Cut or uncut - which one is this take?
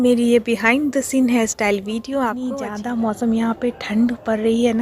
cut